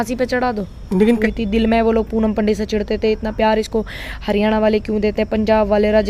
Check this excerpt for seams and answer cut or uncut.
cut